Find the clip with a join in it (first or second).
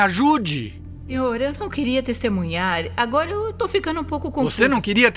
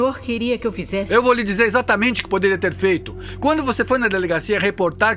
first